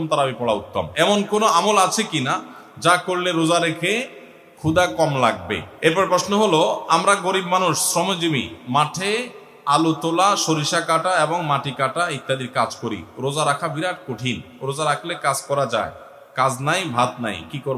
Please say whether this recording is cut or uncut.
cut